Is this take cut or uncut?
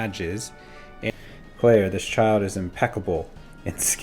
cut